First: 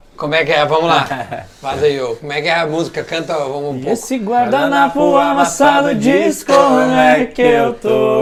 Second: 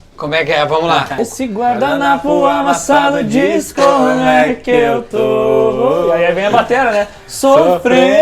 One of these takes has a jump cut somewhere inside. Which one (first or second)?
second